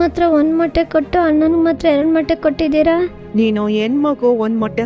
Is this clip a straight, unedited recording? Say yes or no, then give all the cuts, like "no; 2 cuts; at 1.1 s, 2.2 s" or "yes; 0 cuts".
no; 1 cut; at 3.2 s